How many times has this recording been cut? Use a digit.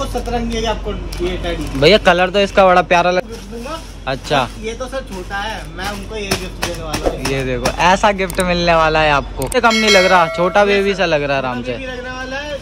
2